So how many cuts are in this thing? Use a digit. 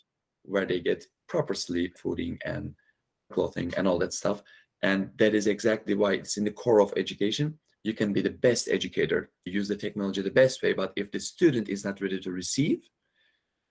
4